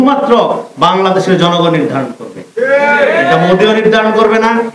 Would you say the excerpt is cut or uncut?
uncut